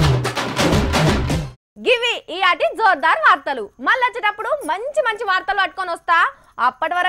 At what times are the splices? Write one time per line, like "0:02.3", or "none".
none